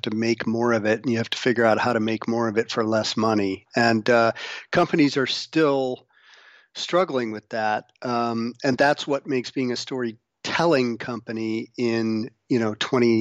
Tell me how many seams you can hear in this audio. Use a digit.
0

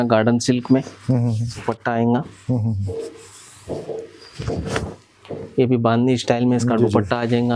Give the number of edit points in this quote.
1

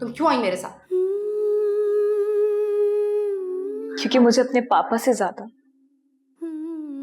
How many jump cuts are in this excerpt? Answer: 1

